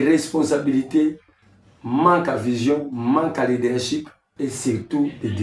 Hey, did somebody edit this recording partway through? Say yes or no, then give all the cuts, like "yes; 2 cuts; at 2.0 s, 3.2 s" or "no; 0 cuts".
yes; 1 cut; at 4.2 s